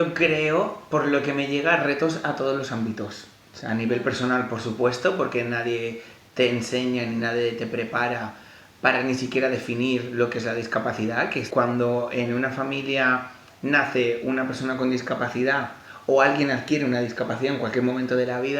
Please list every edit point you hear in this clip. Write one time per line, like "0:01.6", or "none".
0:11.5